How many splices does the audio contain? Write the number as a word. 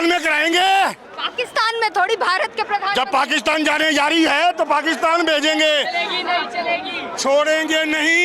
zero